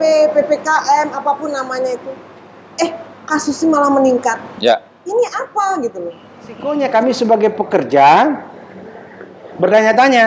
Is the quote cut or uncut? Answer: cut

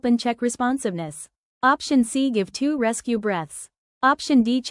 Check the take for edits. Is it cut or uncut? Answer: cut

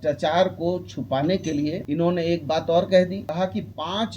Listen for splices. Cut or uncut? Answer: cut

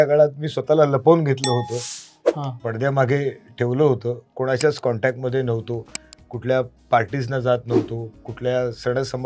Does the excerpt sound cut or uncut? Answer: uncut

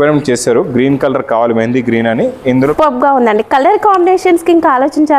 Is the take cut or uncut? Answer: cut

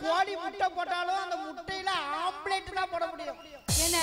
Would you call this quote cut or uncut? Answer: uncut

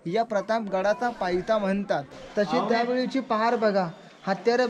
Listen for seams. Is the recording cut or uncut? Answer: cut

